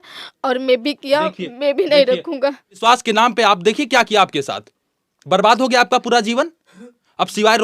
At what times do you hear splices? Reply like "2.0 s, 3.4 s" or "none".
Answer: 2.8 s